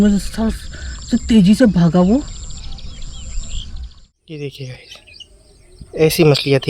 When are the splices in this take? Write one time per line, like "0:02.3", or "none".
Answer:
0:04.3